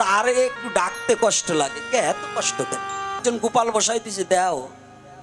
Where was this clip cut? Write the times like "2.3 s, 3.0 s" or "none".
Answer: 3.2 s